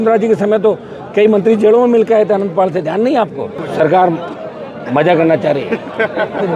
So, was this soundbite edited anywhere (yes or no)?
yes